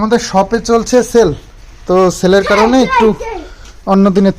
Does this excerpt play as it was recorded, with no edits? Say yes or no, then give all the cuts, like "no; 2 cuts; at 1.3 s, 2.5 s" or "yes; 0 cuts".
yes; 0 cuts